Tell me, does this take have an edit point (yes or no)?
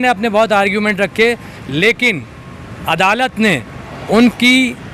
no